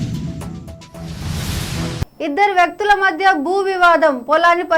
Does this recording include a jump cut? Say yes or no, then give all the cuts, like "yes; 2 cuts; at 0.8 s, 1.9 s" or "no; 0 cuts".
yes; 1 cut; at 2.0 s